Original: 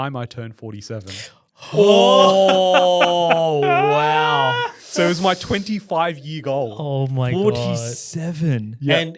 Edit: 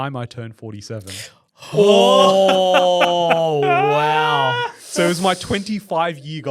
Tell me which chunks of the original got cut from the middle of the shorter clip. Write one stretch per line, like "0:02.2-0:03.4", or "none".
none